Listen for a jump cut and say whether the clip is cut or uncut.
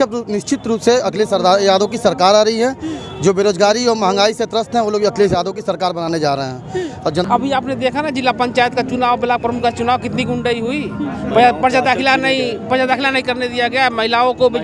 uncut